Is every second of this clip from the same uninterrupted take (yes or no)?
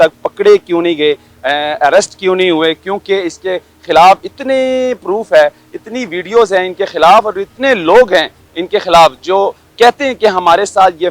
yes